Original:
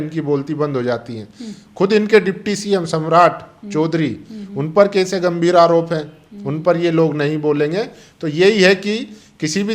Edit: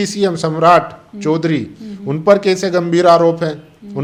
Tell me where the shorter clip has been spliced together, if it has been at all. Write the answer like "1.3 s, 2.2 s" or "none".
none